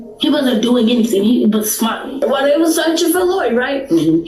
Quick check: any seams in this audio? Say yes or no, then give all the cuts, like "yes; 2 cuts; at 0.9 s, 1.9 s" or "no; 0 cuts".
yes; 1 cut; at 2.2 s